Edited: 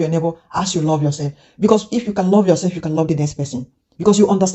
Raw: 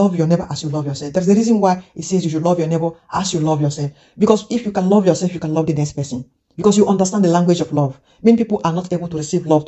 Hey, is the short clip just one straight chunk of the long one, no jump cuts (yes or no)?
yes